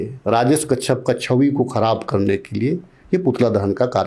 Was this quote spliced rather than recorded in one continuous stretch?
no; 0 cuts

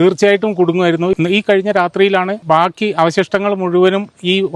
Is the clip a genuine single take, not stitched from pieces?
no; 2 cuts; at 1.1 s, 2.4 s

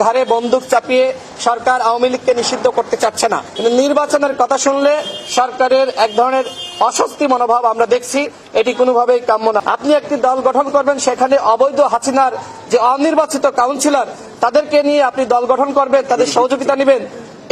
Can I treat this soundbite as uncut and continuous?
no; 2 cuts; at 3.5 s, 9.6 s

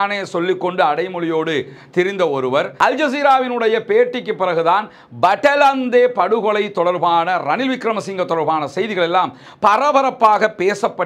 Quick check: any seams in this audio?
yes; 1 cut; at 2.7 s

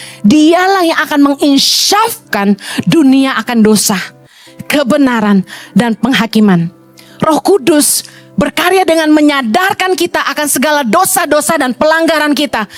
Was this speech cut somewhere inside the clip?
no; 0 cuts

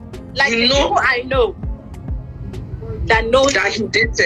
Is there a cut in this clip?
no; 0 cuts

